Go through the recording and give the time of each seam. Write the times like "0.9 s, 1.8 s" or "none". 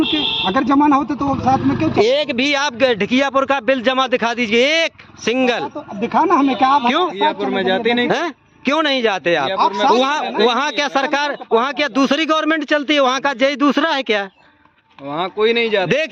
none